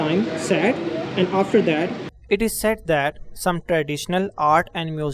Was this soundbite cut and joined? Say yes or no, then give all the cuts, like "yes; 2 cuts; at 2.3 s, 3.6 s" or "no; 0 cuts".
no; 0 cuts